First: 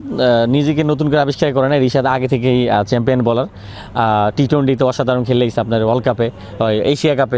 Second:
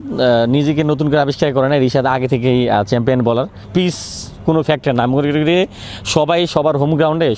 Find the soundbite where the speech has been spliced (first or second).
second